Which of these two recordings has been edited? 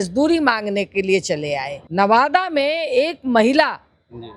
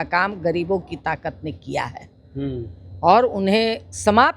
first; 1 cut; at 1.8 s

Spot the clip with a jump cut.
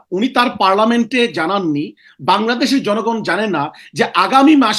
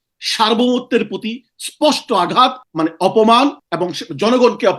second; 2 cuts; at 2.6 s, 3.7 s

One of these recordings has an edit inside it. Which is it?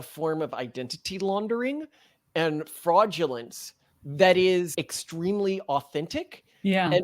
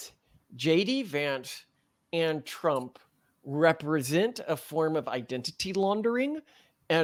first; 1 cut; at 4.7 s

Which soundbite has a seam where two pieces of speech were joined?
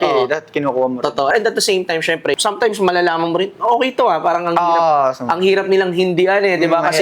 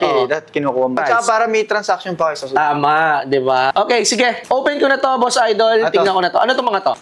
second; 2 cuts; at 1.0 s, 3.7 s

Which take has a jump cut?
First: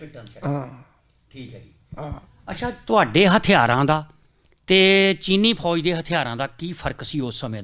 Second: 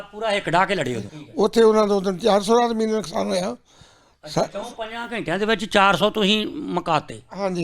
second; 1 cut; at 1.0 s

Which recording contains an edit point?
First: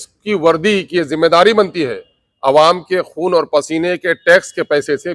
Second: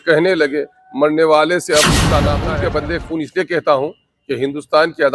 second; 1 cut; at 2.3 s

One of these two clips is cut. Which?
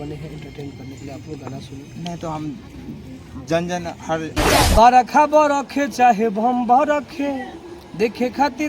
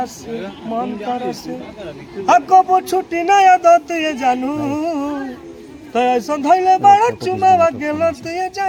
first; 1 cut; at 4.6 s

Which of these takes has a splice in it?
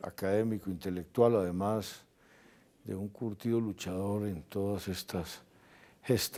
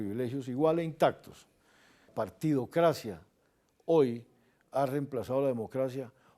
second; 1 cut; at 2.1 s

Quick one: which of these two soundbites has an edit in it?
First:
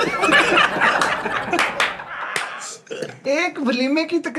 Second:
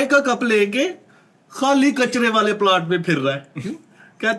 first; 1 cut; at 3.3 s

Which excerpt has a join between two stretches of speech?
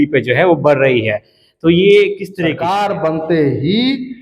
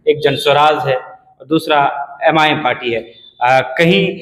first; 1 cut; at 2.6 s

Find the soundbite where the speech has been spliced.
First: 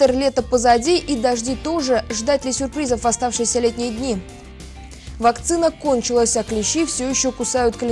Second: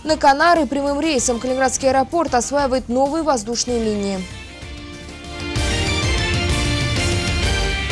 second; 1 cut; at 4.6 s

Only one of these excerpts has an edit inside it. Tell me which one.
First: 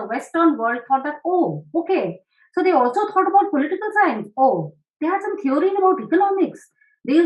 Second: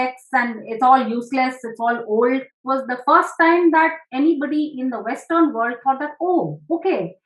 second; 1 cut; at 2.6 s

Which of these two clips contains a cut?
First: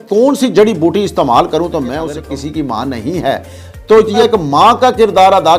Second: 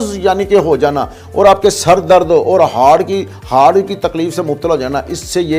first; 2 cuts; at 2.1 s, 4.2 s

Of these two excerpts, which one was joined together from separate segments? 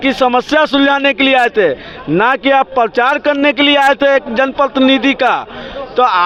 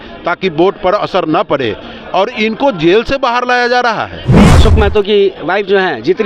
second; 1 cut; at 4.5 s

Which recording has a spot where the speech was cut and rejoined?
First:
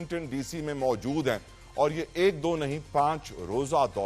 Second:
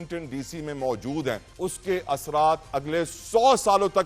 second; 1 cut; at 1.5 s

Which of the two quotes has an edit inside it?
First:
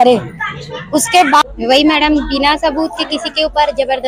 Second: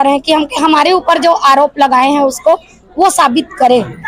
first; 1 cut; at 1.4 s

